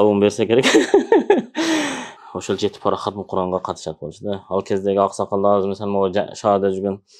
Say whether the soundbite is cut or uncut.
cut